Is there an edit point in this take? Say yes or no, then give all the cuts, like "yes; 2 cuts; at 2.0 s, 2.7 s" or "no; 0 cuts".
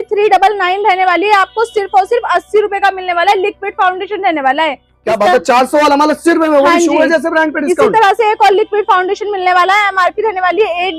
no; 0 cuts